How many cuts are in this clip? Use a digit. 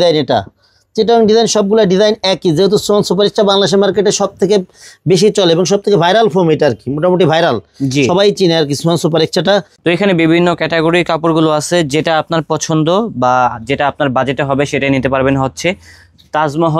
1